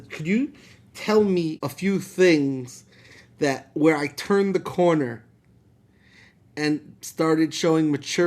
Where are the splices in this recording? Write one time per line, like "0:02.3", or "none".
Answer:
0:01.6